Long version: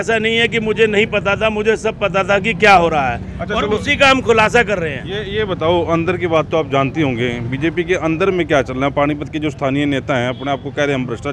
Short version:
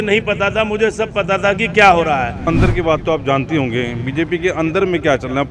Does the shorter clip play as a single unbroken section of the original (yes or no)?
no